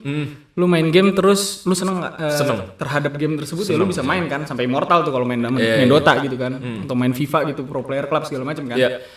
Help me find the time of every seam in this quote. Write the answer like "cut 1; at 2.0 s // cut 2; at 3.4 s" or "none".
none